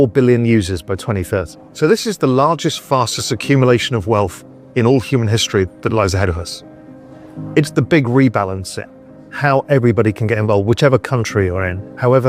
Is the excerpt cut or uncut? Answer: cut